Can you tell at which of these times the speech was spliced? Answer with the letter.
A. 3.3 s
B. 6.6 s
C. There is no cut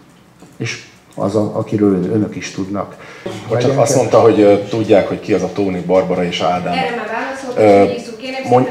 A